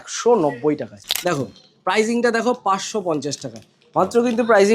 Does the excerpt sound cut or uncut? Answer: cut